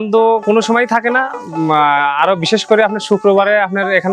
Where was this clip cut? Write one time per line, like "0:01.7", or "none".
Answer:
none